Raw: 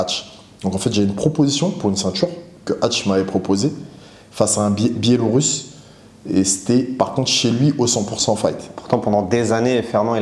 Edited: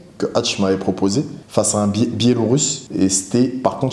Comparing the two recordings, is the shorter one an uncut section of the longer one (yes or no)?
no